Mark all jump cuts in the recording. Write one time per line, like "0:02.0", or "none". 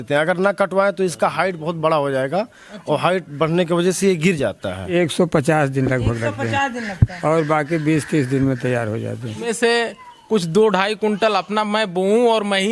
0:04.9
0:09.5